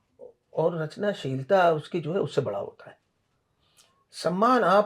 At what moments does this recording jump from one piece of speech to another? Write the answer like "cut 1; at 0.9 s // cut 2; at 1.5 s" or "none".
none